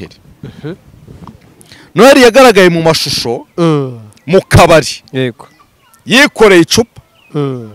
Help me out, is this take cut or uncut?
uncut